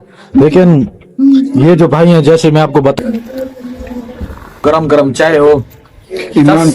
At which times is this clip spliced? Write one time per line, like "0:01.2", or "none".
0:03.0
0:04.6